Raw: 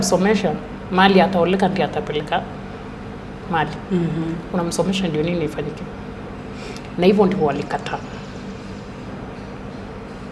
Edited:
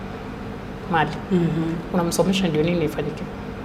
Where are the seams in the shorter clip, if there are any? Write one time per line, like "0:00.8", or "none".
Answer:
none